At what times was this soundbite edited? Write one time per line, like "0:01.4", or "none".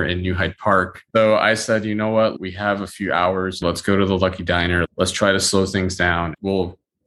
0:01.1
0:03.6
0:06.3